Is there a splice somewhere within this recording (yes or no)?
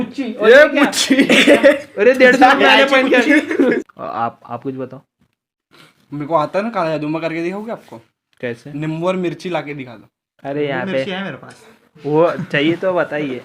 yes